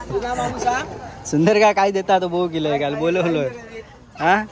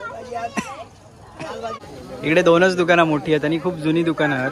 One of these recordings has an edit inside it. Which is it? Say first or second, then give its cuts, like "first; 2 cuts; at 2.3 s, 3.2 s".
second; 1 cut; at 1.8 s